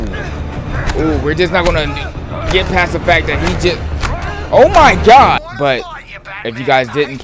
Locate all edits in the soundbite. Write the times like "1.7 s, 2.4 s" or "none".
5.4 s